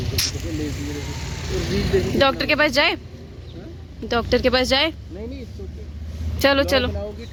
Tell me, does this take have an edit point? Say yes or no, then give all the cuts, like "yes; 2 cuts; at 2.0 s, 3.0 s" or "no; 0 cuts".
no; 0 cuts